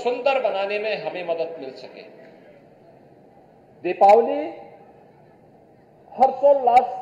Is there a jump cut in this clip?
no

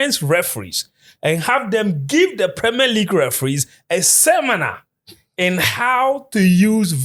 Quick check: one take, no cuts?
yes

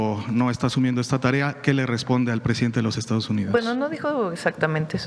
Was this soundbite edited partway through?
no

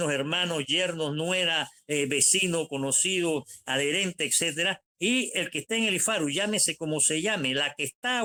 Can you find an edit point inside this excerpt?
no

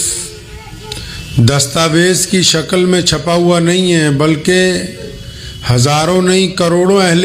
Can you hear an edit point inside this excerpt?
no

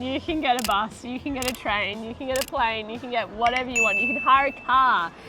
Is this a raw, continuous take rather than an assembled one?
yes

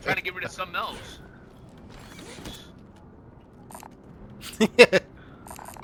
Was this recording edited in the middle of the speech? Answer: no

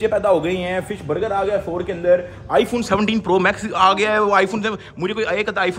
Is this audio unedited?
yes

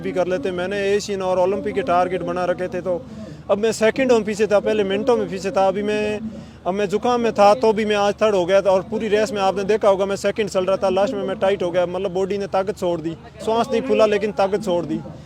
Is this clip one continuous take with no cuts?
yes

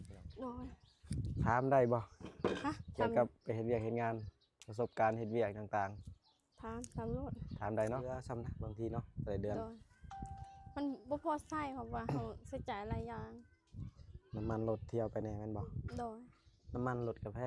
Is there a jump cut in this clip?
yes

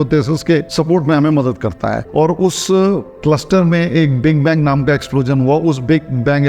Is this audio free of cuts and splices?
no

